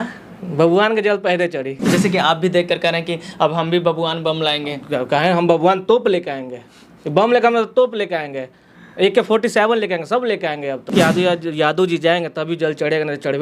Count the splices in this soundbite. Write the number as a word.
two